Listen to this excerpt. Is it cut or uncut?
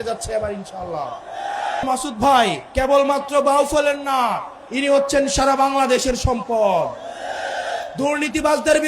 cut